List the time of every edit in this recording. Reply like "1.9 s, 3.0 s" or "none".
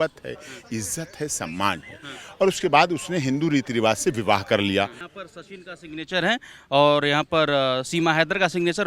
5.0 s